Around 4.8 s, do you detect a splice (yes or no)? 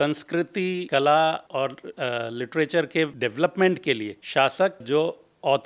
yes